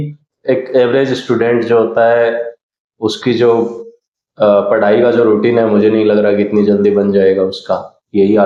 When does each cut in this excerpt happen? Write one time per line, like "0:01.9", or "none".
none

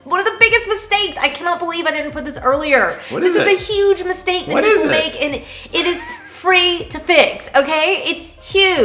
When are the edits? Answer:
none

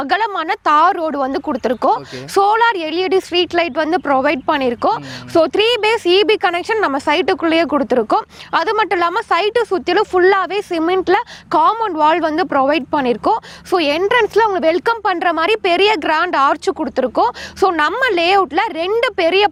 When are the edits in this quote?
none

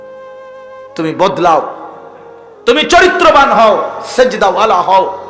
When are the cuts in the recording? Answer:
0:01.0

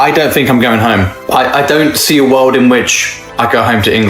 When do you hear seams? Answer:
0:01.2

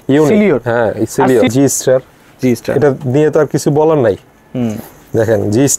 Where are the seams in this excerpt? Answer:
0:01.5

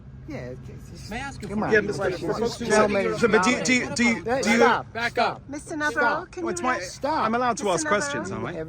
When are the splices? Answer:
0:02.2

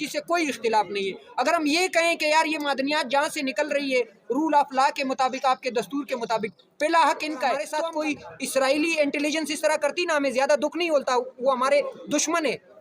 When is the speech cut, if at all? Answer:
0:07.7

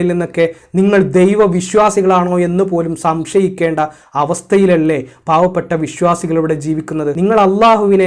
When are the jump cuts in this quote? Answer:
0:07.2

